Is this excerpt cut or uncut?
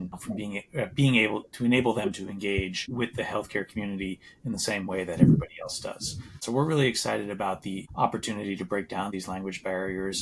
cut